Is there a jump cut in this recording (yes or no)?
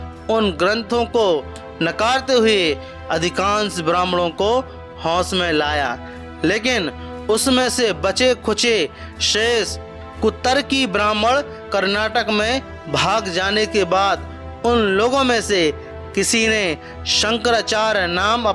no